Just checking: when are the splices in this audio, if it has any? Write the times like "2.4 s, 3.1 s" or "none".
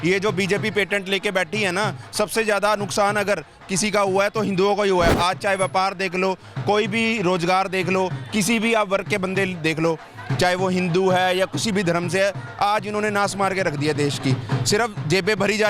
none